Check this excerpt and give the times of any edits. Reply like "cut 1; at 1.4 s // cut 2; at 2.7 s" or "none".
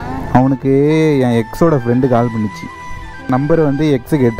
cut 1; at 3.3 s

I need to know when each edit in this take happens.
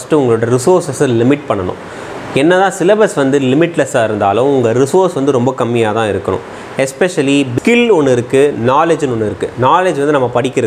cut 1; at 7.5 s

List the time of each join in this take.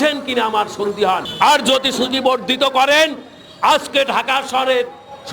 cut 1; at 1.3 s

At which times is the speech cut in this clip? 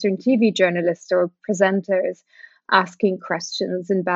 none

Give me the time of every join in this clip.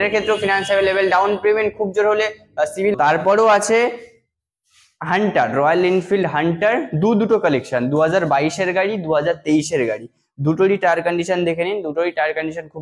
cut 1; at 2.9 s

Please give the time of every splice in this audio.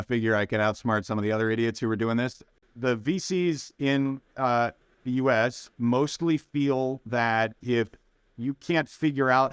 cut 1; at 2.5 s

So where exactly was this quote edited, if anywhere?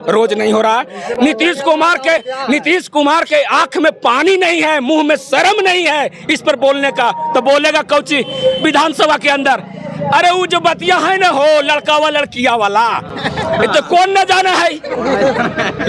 none

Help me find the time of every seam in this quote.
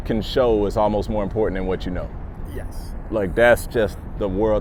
none

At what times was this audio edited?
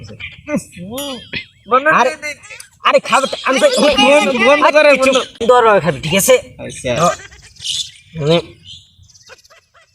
cut 1; at 5.3 s

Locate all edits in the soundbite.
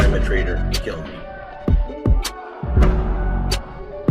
cut 1; at 1.3 s

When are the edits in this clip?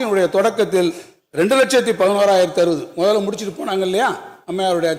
none

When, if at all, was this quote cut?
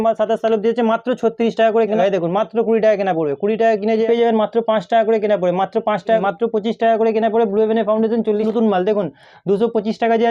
cut 1; at 2.0 s // cut 2; at 4.0 s // cut 3; at 6.2 s // cut 4; at 8.5 s

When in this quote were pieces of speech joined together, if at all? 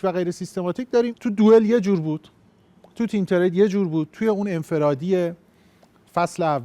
cut 1; at 1.1 s

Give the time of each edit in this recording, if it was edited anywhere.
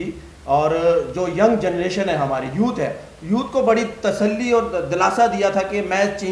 none

